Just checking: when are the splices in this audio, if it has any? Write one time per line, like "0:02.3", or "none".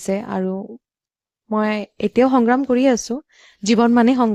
none